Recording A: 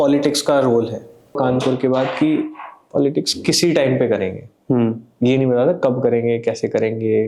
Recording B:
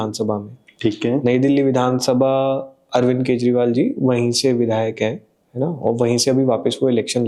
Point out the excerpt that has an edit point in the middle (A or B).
A